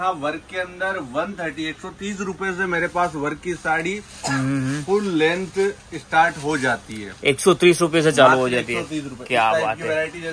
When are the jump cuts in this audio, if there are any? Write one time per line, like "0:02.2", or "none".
none

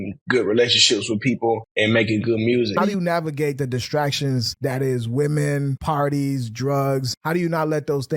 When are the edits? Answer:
0:01.7
0:02.8
0:04.5
0:05.8
0:07.1

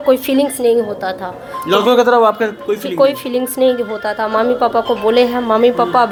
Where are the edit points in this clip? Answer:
none

